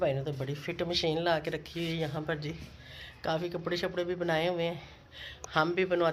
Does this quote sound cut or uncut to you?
uncut